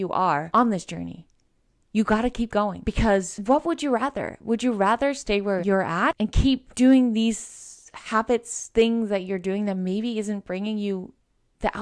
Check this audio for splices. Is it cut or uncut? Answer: cut